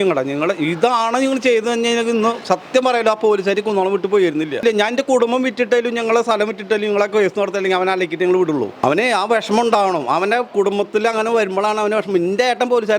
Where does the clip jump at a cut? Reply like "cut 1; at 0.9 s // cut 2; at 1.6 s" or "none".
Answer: cut 1; at 4.6 s // cut 2; at 8.7 s